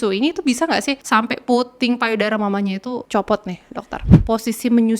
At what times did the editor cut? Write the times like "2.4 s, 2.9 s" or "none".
1.0 s, 3.0 s, 4.1 s